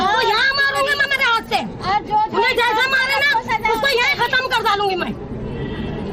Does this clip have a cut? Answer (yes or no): no